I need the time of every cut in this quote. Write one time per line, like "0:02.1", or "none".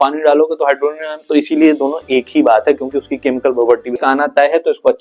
0:04.0